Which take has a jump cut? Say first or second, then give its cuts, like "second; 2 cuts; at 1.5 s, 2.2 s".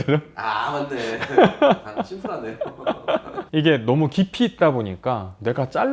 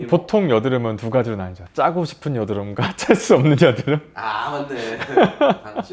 first; 1 cut; at 3.4 s